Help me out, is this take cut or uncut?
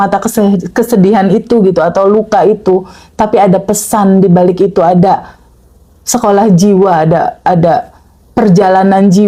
uncut